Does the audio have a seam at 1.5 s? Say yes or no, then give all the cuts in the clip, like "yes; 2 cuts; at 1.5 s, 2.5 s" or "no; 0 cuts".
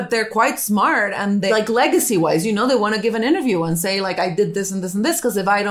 yes; 1 cut; at 1.5 s